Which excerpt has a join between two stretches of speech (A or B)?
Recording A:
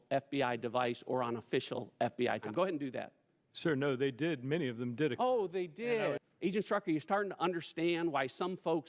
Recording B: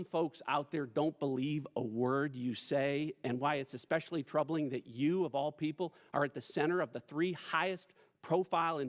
A